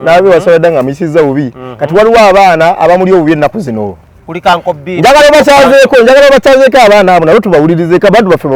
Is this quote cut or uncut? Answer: uncut